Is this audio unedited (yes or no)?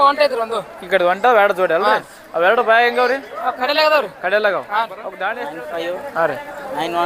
no